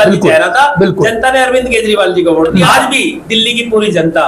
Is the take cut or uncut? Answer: cut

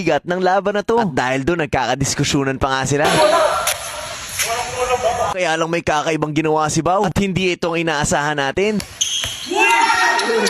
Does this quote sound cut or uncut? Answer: uncut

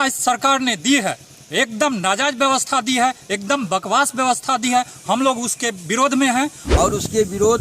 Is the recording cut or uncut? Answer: cut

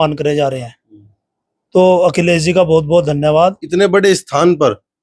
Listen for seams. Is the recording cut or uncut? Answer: cut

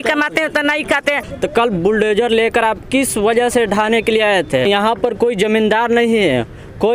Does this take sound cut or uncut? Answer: cut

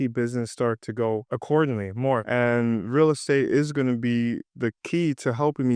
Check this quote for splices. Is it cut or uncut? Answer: cut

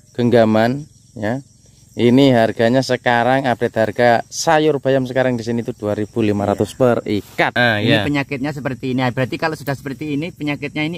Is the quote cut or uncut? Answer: cut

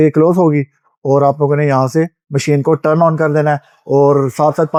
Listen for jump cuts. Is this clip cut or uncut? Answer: uncut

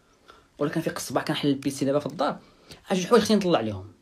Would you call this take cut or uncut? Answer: uncut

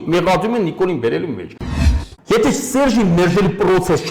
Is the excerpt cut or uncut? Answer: cut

